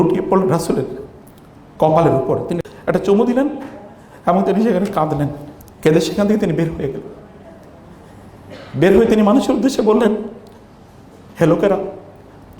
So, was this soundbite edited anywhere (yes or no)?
yes